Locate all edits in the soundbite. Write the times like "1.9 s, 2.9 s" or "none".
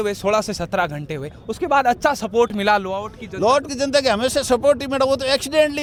none